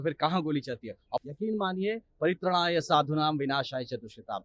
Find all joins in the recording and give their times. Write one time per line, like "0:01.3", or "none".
0:01.2